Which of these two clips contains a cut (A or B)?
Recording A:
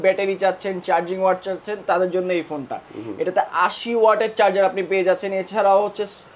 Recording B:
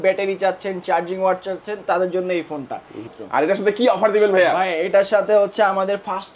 B